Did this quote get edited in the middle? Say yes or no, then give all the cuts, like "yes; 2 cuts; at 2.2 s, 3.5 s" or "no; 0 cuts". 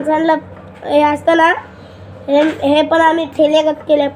no; 0 cuts